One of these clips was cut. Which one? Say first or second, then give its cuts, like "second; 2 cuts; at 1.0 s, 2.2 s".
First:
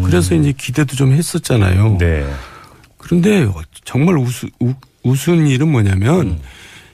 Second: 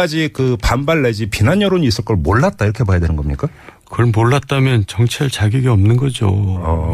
second; 1 cut; at 4.1 s